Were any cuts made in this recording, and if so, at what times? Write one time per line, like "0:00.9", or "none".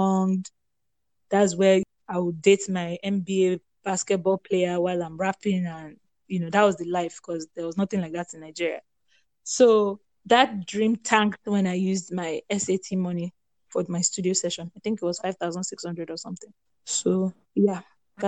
0:01.9